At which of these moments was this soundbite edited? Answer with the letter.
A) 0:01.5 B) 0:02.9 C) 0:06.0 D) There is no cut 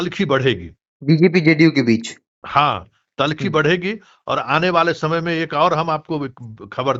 D